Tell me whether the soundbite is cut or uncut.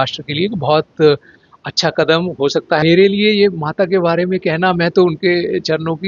cut